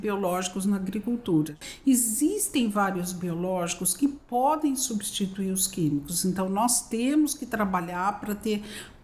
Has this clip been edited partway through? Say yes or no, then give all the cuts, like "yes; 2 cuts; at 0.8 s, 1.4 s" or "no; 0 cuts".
yes; 1 cut; at 1.6 s